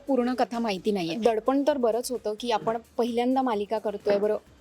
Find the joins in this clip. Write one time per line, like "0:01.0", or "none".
0:01.2